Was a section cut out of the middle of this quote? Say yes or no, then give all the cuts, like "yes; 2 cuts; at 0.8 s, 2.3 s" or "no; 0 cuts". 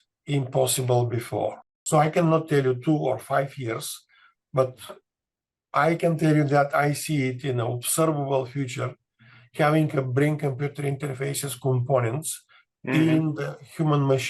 yes; 1 cut; at 1.7 s